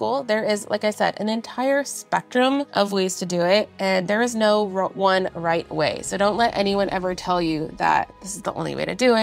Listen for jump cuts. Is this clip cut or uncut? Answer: cut